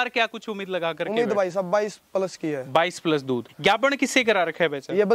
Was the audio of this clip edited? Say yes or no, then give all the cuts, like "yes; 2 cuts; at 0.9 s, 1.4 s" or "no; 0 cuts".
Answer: yes; 1 cut; at 3.5 s